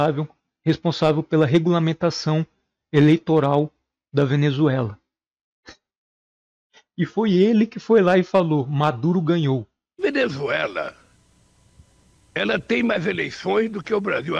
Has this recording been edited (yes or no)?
yes